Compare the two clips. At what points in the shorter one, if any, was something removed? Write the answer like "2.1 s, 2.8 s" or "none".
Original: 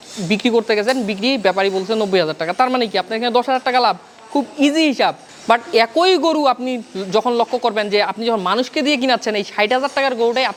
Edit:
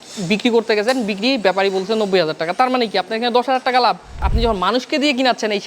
4.3 s